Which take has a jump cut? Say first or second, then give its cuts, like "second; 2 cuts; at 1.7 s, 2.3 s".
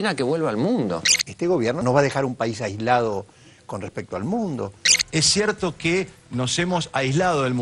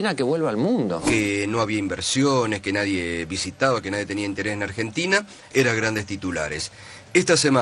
second; 1 cut; at 1.1 s